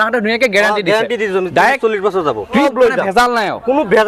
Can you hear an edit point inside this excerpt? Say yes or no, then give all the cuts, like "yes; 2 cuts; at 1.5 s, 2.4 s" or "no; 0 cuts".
yes; 1 cut; at 2.6 s